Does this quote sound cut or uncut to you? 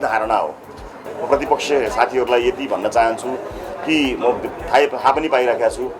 cut